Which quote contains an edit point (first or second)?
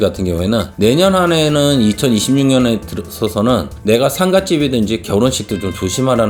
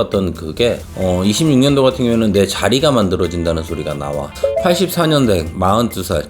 second